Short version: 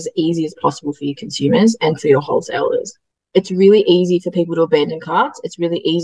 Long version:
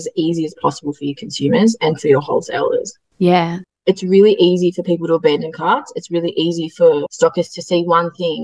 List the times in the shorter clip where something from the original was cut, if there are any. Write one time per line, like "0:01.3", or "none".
0:03.1